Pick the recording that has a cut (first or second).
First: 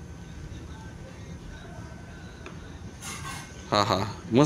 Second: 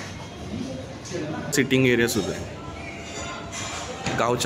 second